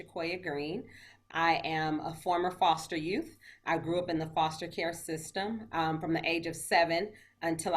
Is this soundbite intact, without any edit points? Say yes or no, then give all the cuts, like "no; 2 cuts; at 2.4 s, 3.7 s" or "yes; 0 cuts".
no; 1 cut; at 1.2 s